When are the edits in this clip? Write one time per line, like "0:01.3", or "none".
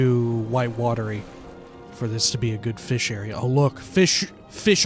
0:01.2